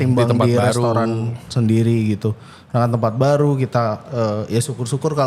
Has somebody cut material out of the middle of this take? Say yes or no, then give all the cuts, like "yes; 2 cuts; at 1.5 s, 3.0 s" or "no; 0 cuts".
no; 0 cuts